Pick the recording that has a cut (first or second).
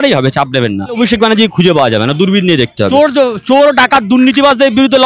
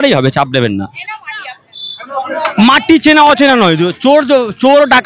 first